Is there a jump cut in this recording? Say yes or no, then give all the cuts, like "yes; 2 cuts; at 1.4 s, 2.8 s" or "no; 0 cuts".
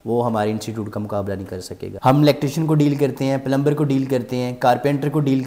yes; 1 cut; at 1.9 s